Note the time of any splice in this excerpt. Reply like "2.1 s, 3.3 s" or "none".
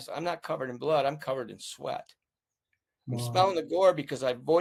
none